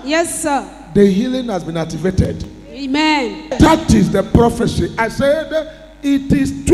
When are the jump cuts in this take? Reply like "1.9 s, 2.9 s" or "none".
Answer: 3.6 s